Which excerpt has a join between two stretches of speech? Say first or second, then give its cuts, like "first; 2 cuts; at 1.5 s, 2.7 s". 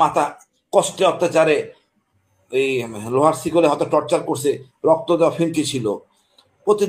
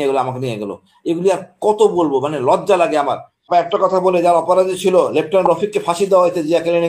second; 1 cut; at 3.4 s